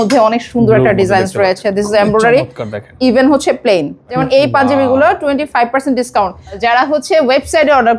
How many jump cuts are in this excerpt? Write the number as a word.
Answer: two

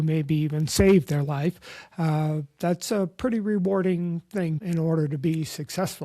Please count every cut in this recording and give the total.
one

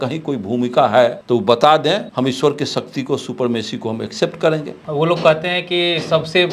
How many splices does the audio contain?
three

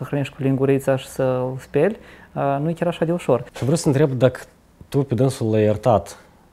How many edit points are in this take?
one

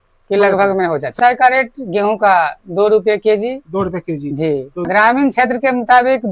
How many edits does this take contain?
two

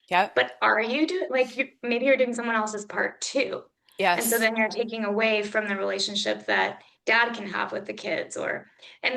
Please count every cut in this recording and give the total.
one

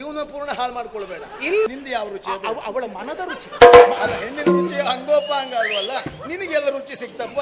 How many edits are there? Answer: one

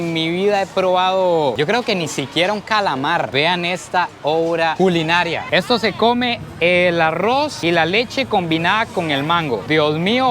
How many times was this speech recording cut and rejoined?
one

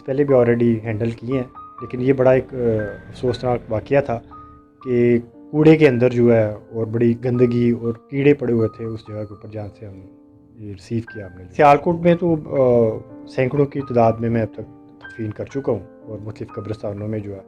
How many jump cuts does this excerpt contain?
one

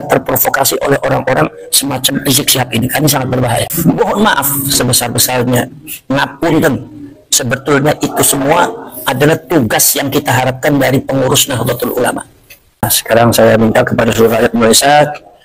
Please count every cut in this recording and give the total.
two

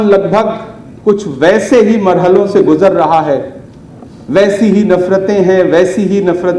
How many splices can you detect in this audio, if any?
zero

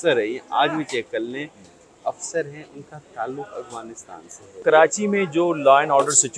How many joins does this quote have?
one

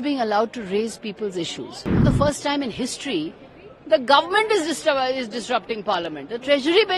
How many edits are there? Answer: one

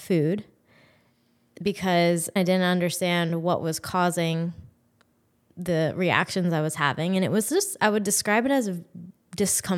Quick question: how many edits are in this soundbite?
one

